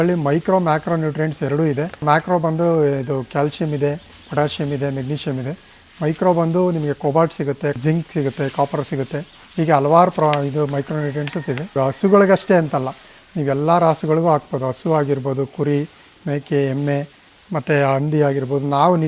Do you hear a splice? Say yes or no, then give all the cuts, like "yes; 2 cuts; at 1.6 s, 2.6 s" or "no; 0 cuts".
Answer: yes; 2 cuts; at 2.0 s, 11.8 s